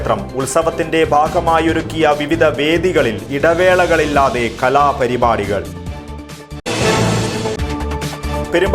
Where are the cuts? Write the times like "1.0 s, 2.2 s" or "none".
none